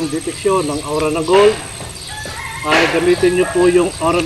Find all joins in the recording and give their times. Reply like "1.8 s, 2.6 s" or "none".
none